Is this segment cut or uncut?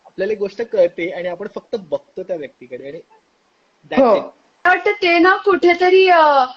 cut